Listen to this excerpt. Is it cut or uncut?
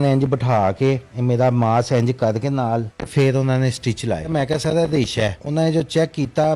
cut